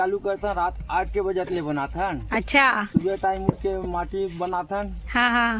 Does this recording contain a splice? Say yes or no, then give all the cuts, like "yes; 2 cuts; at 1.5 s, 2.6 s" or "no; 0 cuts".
no; 0 cuts